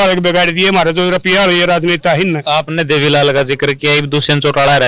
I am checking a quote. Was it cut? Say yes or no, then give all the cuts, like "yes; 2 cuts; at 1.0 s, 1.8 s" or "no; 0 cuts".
no; 0 cuts